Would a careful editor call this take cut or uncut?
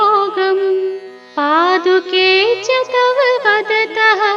uncut